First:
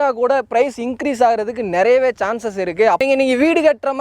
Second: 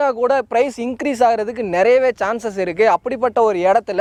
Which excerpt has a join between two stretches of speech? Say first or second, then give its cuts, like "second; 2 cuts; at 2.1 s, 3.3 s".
first; 1 cut; at 3.0 s